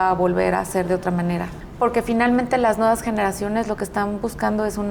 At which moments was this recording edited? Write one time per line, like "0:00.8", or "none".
0:01.6